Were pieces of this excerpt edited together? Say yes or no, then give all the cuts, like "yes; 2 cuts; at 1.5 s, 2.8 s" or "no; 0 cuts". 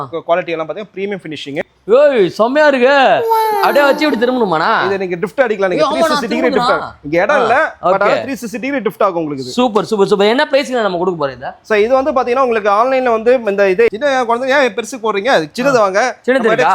yes; 2 cuts; at 1.6 s, 13.9 s